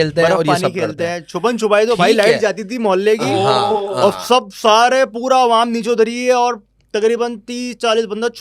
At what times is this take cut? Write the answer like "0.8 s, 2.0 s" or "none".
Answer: none